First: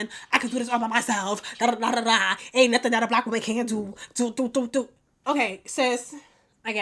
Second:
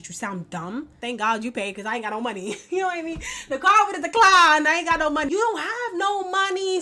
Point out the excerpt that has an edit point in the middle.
second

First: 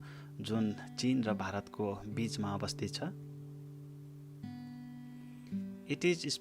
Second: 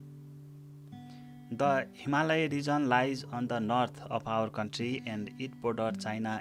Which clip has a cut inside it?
first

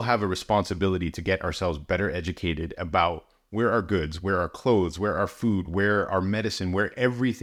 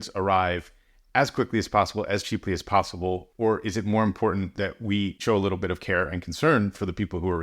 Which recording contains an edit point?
second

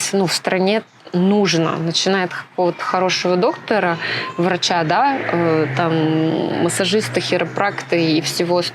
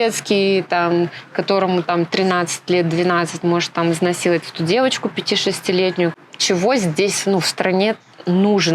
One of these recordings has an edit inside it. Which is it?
second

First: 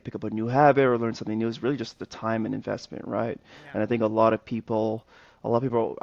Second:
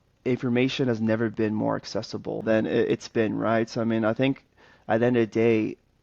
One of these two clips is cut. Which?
second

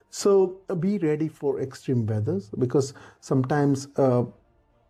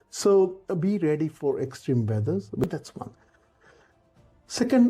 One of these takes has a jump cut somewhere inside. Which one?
second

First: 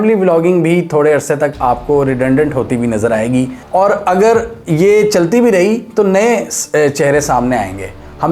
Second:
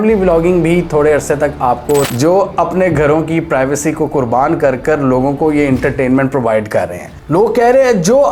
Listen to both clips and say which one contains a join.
second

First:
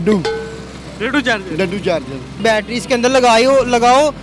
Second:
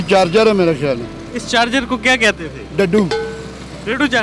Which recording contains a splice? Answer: first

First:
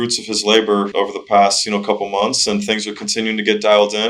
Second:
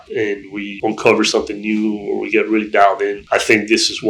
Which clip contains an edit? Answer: second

